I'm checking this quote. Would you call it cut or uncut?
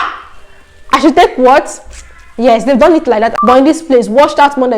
cut